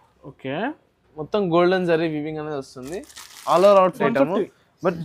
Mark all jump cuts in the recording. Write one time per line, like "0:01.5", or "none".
0:04.0